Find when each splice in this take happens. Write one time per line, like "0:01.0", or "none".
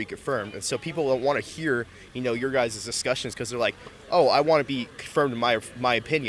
none